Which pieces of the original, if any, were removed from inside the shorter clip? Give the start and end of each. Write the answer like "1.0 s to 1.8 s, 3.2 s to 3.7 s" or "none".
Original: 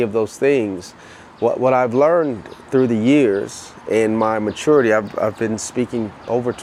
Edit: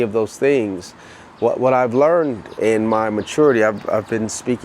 2.4 s to 3.7 s